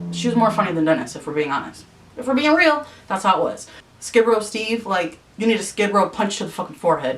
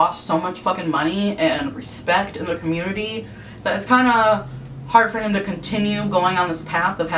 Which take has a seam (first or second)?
first